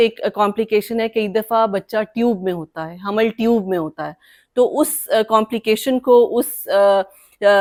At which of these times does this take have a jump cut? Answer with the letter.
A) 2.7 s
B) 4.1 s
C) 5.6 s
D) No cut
D